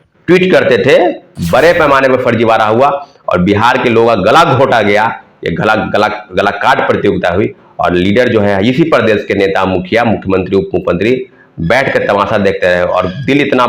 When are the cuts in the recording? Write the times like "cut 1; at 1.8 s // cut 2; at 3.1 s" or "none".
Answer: cut 1; at 1.3 s